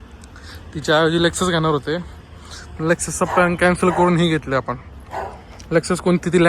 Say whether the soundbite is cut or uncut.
uncut